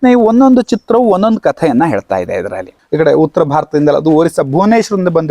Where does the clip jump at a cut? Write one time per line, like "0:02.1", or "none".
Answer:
0:02.7